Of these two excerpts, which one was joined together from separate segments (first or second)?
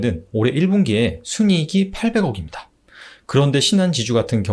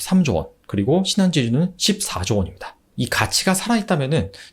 second